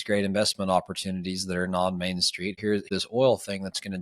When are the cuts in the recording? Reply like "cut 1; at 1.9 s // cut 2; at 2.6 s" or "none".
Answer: cut 1; at 2.8 s